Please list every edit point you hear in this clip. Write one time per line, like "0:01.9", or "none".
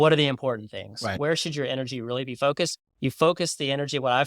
0:01.1

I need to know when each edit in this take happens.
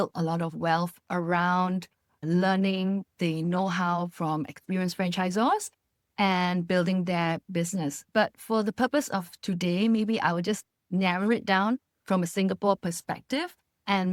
none

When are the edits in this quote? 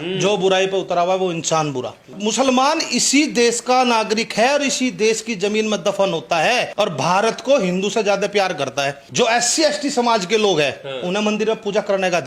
0:02.1
0:06.7
0:09.0

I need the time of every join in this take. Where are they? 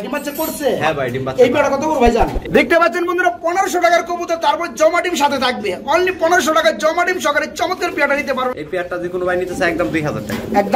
0:02.4
0:08.5

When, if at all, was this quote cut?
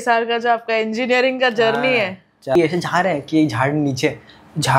0:02.5

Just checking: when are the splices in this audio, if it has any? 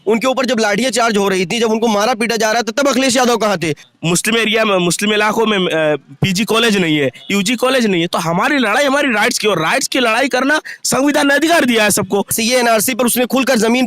0:03.9
0:12.4

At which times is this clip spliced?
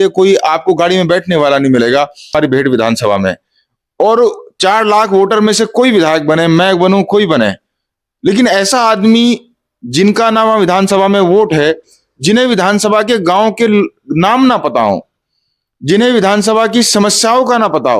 0:02.3

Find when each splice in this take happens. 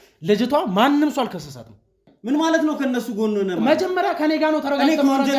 0:02.1

